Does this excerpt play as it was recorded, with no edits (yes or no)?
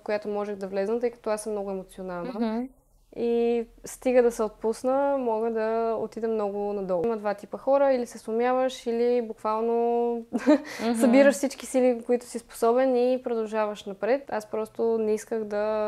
no